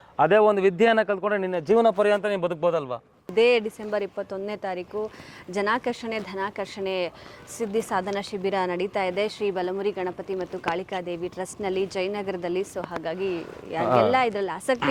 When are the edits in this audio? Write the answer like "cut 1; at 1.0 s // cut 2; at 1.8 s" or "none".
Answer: cut 1; at 3.3 s